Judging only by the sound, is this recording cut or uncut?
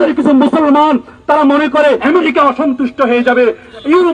cut